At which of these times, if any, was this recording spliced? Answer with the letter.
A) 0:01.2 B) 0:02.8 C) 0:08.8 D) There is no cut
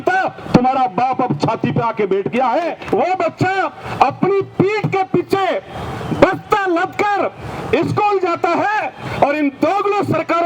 B